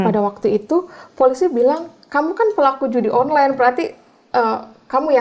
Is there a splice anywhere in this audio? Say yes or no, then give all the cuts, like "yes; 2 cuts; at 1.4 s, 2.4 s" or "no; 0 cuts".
no; 0 cuts